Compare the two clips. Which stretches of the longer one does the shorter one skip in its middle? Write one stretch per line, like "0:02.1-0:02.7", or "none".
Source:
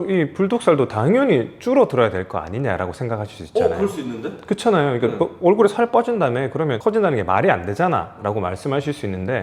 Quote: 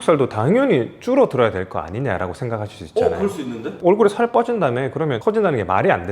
0:04.3-0:05.3